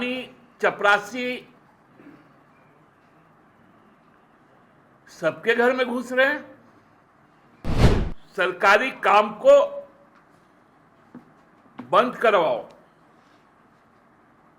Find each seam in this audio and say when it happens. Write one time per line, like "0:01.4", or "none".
0:07.7